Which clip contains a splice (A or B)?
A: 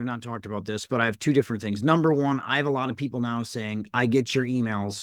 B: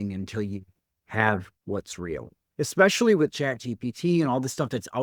B